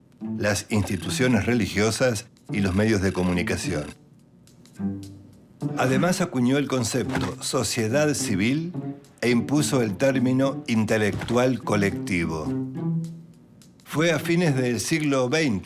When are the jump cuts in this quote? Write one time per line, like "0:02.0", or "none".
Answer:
none